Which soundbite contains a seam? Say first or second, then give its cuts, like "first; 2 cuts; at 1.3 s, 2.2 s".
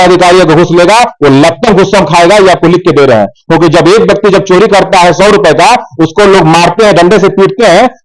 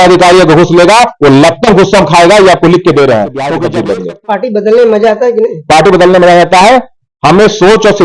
second; 1 cut; at 3.6 s